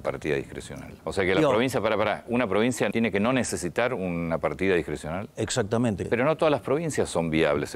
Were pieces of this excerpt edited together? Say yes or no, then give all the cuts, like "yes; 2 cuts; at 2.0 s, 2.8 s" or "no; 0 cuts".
yes; 3 cuts; at 1.0 s, 2.9 s, 6.0 s